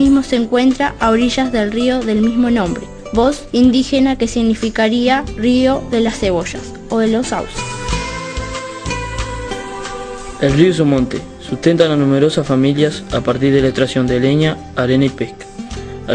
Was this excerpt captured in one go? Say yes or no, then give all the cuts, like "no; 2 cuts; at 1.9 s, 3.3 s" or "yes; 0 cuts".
no; 1 cut; at 6.4 s